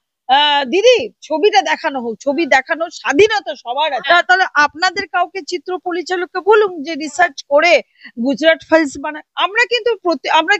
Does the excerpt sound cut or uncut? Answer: cut